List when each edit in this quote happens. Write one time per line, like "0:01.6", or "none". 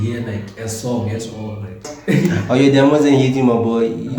0:01.9